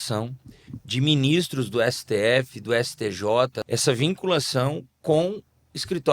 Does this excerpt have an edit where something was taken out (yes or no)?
yes